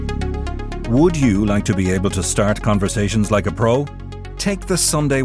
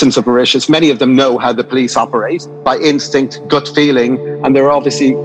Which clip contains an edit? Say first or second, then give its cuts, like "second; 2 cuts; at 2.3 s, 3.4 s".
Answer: second; 2 cuts; at 2.5 s, 4.3 s